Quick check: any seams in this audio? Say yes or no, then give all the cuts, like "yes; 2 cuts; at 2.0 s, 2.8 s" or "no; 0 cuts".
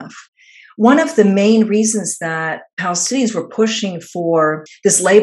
no; 0 cuts